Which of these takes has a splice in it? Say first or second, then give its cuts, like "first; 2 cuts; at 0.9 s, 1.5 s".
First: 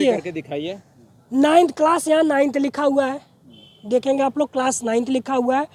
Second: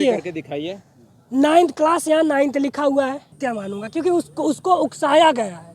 second; 1 cut; at 3.3 s